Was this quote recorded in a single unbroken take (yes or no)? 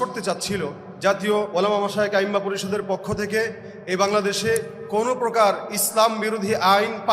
no